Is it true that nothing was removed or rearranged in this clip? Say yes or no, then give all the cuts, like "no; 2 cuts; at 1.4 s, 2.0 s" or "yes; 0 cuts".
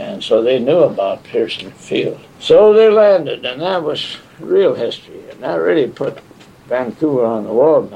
no; 1 cut; at 2.3 s